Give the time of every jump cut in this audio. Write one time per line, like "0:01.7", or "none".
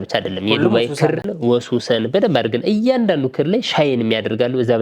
0:01.3